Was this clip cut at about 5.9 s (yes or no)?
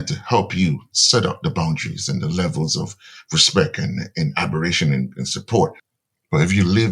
yes